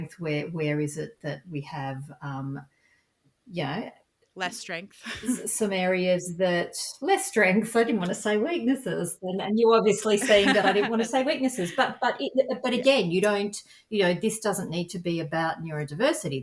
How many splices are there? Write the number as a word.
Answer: zero